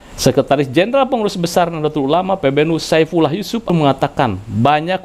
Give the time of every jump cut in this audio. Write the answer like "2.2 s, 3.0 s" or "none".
3.7 s